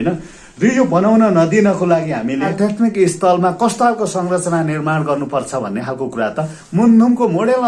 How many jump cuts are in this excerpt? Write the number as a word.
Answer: one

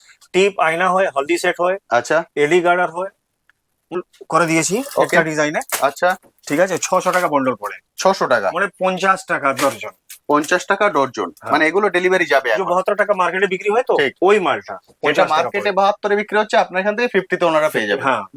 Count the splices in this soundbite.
one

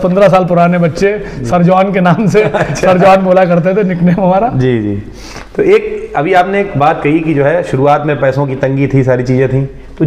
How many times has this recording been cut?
zero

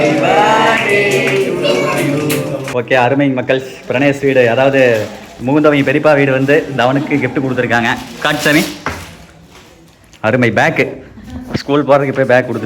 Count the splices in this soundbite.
one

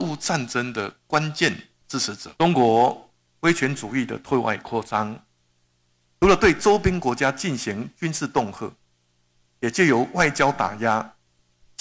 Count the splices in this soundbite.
one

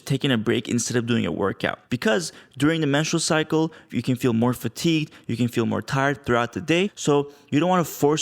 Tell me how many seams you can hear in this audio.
two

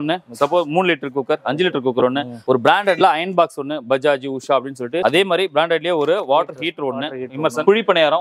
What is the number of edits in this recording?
two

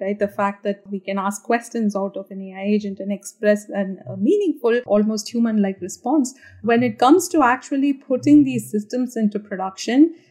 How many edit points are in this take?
two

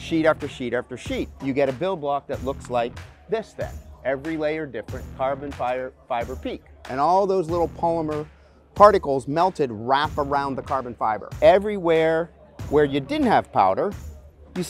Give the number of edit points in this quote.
three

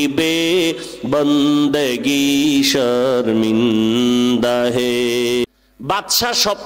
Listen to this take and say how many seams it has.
one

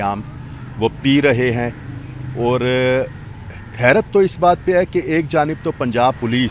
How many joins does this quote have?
zero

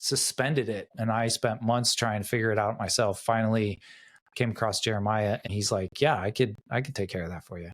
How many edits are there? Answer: two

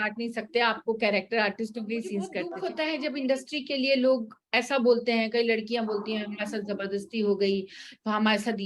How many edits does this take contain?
one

